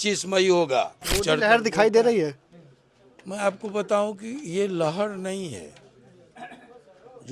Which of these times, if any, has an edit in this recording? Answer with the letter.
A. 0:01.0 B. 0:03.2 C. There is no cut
A